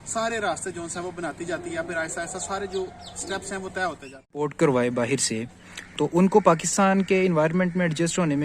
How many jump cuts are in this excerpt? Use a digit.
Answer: 1